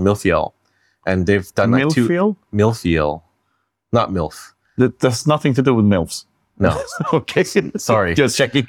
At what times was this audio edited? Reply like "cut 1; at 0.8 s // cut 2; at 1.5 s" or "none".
none